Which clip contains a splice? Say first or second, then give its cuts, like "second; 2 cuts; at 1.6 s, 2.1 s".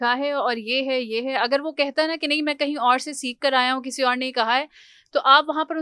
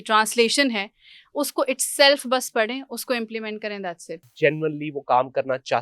second; 1 cut; at 4.3 s